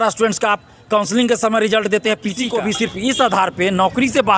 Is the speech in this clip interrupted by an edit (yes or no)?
yes